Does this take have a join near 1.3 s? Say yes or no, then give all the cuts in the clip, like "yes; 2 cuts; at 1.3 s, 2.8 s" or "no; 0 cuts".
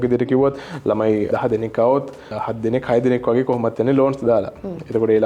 yes; 1 cut; at 1.3 s